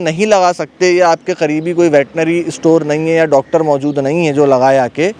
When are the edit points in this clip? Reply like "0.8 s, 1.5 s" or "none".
none